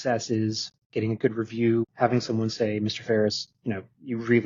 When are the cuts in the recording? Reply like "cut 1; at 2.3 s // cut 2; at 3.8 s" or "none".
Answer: cut 1; at 1.9 s